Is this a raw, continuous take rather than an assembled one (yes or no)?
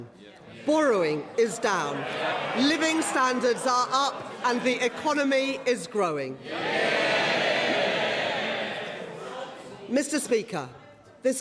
yes